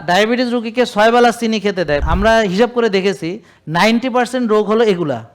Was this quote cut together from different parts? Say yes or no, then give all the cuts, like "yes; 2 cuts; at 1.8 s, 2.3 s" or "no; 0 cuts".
yes; 1 cut; at 2.0 s